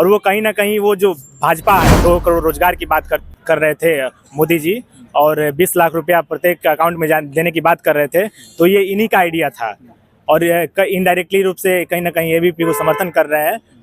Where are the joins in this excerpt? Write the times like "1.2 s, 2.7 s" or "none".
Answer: 2.0 s